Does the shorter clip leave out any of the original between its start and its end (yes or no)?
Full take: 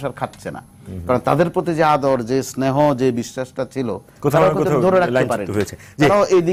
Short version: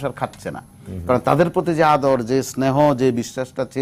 no